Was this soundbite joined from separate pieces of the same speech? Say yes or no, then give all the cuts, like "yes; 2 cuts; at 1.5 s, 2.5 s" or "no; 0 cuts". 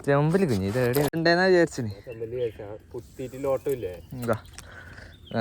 yes; 1 cut; at 1.2 s